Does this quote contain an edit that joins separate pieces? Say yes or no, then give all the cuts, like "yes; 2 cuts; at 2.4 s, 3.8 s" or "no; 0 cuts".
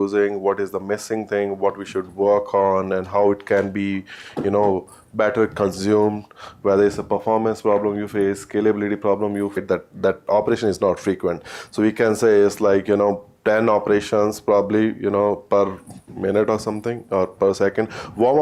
no; 0 cuts